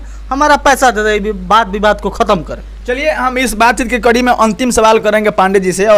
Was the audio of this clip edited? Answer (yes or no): no